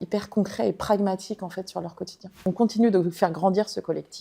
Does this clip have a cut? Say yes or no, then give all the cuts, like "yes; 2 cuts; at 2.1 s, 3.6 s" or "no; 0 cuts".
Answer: yes; 1 cut; at 2.4 s